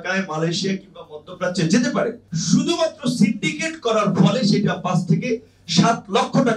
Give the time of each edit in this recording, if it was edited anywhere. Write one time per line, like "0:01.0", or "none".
0:02.3